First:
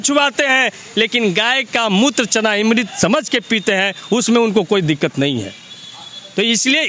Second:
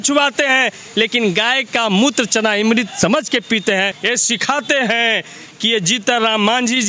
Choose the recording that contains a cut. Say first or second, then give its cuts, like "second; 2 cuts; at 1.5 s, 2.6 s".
second; 1 cut; at 4.0 s